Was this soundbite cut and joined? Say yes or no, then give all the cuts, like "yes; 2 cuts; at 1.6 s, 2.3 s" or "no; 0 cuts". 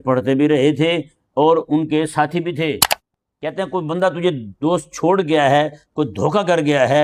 yes; 1 cut; at 3.0 s